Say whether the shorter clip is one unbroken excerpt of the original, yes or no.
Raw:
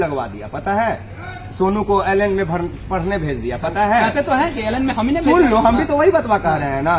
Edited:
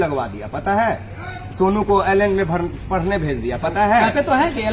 yes